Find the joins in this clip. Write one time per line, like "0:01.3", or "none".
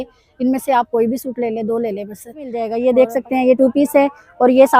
0:02.8